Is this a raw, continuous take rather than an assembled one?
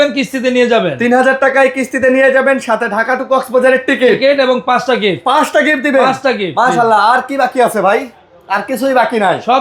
yes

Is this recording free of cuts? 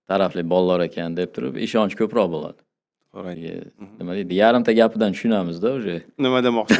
no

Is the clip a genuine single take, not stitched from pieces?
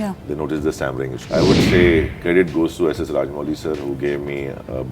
no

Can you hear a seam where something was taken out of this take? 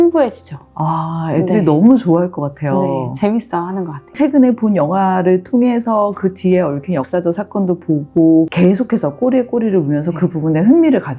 yes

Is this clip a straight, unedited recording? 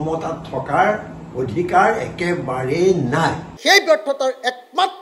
no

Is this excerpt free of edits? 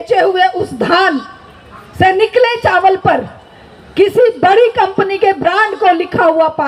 yes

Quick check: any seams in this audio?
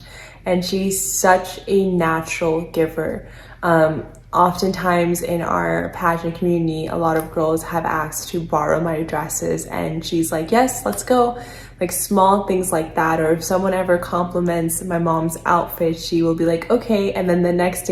no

